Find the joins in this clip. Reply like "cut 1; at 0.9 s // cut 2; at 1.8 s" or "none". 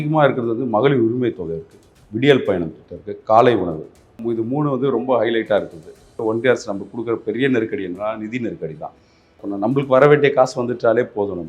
cut 1; at 4.2 s // cut 2; at 6.2 s // cut 3; at 9.4 s